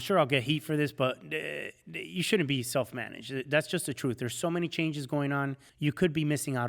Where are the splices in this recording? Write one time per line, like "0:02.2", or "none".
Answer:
0:05.6